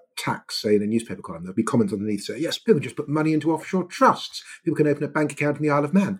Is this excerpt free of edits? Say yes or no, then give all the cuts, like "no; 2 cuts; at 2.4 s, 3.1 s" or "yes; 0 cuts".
no; 2 cuts; at 1.4 s, 2.6 s